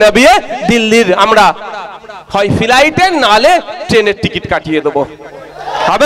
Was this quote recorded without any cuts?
yes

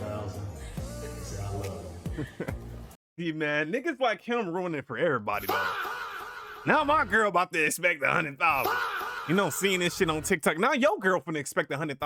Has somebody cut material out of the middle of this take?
no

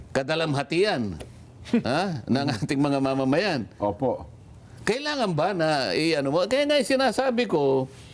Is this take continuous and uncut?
yes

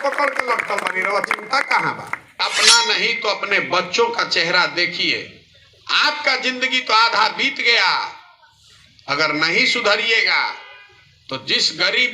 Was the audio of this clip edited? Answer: yes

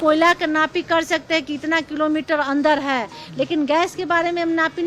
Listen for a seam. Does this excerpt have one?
no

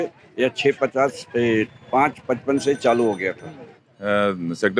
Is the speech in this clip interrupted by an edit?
yes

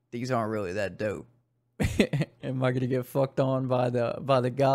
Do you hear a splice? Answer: no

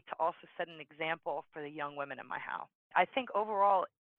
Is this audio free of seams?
no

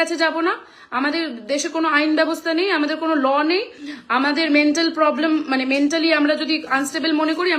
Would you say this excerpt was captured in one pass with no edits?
yes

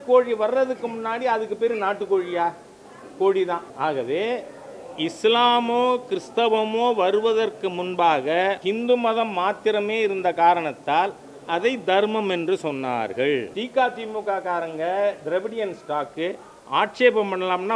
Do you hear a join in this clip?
yes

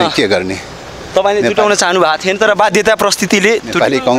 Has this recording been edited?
no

